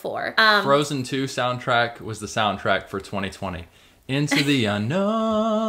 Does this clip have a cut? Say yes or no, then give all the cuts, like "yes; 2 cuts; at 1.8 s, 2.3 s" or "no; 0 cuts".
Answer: no; 0 cuts